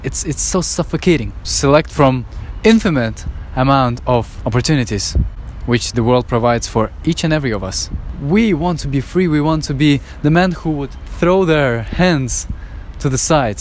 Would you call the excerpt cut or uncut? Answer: cut